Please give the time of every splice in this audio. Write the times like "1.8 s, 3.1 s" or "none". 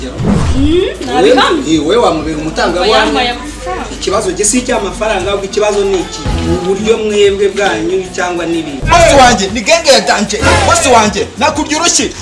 8.8 s

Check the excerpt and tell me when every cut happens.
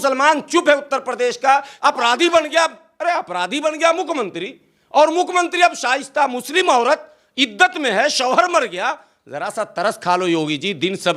1.7 s

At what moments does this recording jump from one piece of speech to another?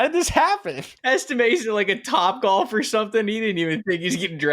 0.9 s

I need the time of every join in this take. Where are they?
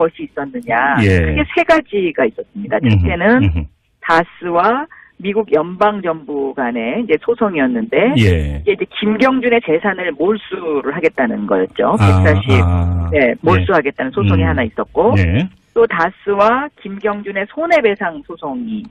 none

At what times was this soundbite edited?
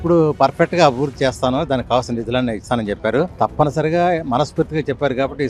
none

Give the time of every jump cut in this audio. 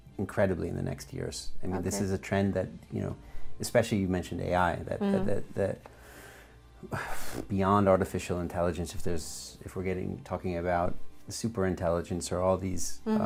none

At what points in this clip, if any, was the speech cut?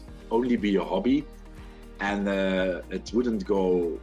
none

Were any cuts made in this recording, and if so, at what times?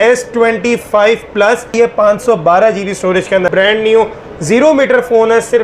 1.7 s, 3.5 s

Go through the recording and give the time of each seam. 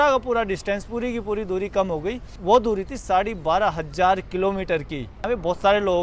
2.4 s, 5.0 s

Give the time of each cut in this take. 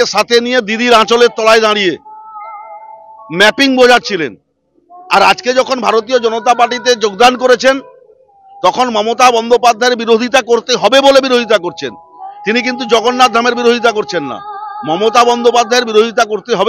none

